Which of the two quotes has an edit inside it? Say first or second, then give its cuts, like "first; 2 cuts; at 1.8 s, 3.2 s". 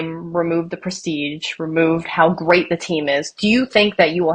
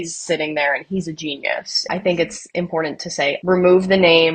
second; 2 cuts; at 1.7 s, 3.4 s